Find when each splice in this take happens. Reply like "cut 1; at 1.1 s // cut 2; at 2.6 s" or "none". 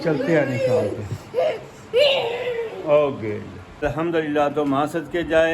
cut 1; at 3.8 s